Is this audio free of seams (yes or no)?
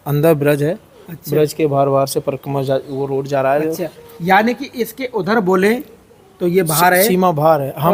yes